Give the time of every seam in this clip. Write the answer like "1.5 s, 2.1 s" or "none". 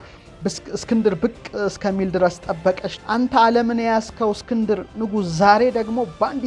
2.9 s